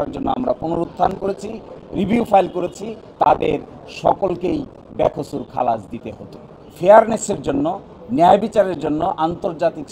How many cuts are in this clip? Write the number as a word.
one